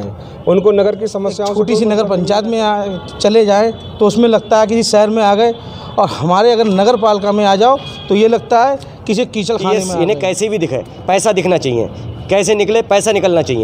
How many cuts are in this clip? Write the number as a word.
two